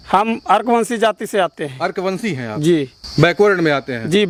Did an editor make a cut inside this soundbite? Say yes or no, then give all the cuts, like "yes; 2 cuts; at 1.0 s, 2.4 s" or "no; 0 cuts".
no; 0 cuts